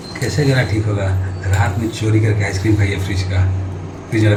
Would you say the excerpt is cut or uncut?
uncut